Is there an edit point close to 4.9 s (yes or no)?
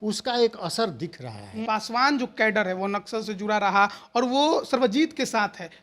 no